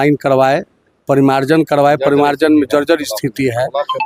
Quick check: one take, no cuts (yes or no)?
yes